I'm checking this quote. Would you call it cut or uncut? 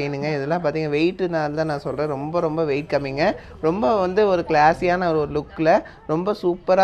uncut